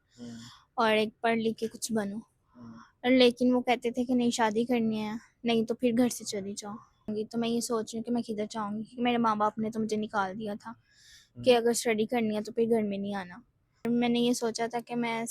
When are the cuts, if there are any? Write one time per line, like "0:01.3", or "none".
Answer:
0:07.1
0:13.9